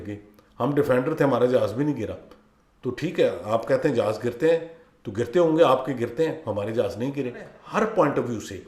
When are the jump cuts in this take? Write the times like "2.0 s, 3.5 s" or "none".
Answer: 7.6 s